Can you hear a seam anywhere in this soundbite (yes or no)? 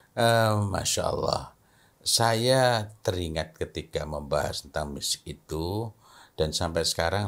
no